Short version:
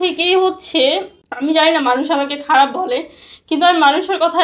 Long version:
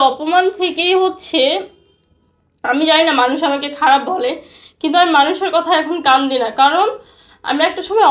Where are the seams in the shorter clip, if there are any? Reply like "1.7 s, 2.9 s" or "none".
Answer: 1.2 s